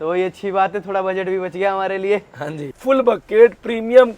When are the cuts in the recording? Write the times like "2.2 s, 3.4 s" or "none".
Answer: 2.8 s